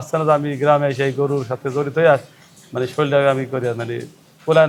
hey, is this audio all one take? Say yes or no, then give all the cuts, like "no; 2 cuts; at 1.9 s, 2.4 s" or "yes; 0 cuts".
yes; 0 cuts